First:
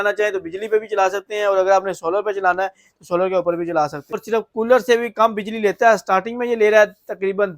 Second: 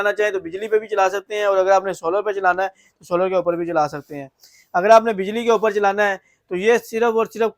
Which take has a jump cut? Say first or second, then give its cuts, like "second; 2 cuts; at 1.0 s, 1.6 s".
first; 1 cut; at 4.2 s